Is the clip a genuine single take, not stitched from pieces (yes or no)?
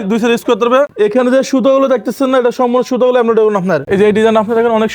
no